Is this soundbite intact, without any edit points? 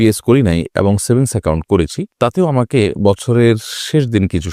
yes; 0 cuts

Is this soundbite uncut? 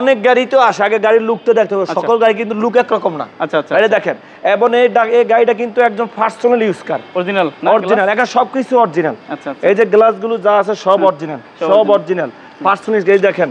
yes; 0 cuts

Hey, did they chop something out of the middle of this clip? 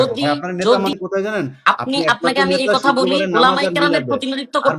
yes; 1 cut; at 0.9 s

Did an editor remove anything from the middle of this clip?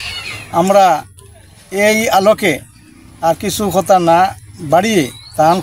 no; 0 cuts

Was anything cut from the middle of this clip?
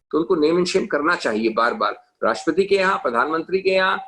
no; 0 cuts

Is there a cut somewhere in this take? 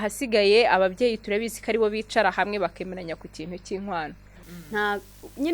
yes; 1 cut; at 4.4 s

